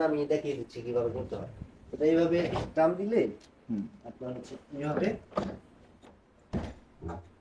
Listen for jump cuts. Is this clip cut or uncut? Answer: uncut